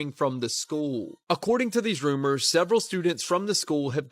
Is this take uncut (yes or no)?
yes